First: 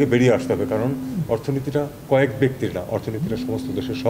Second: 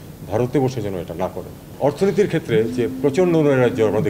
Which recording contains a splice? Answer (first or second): second